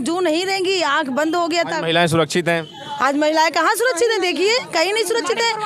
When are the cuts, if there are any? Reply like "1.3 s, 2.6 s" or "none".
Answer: none